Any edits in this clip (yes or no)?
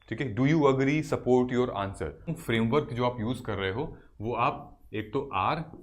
yes